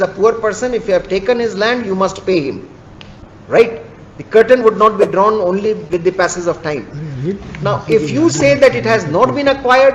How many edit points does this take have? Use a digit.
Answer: 0